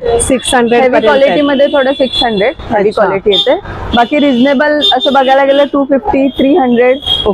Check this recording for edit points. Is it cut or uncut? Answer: uncut